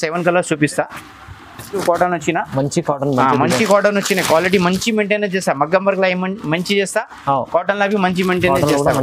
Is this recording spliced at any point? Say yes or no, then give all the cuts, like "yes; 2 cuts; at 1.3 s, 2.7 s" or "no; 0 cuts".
yes; 1 cut; at 1.8 s